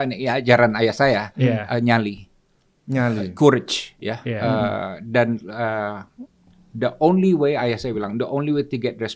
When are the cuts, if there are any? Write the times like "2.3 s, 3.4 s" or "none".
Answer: none